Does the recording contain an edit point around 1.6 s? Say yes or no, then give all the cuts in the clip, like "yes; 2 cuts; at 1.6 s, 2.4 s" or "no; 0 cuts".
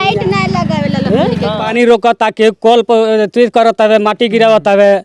yes; 1 cut; at 1.6 s